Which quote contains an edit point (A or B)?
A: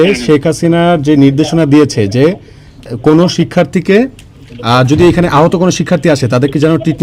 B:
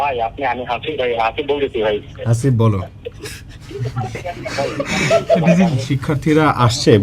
B